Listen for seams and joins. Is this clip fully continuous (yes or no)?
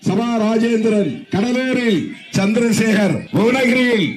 no